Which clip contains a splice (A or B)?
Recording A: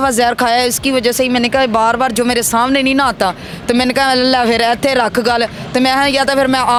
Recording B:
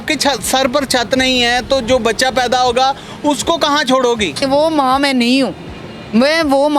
B